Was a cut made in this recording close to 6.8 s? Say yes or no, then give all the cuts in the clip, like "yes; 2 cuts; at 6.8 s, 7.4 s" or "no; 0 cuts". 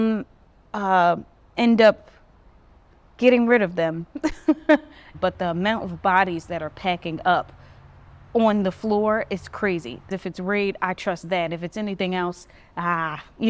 no; 2 cuts; at 5.0 s, 10.1 s